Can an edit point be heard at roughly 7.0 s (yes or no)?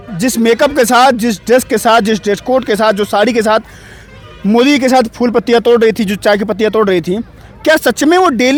no